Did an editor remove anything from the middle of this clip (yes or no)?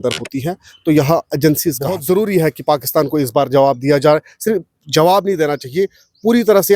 yes